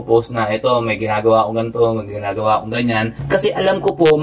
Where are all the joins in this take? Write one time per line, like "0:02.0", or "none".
0:03.2